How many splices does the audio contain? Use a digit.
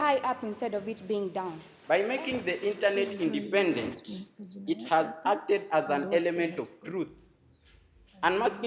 1